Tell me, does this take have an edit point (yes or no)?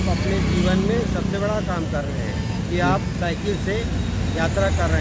no